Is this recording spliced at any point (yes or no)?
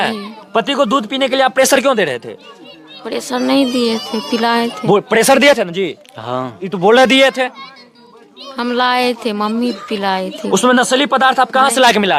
no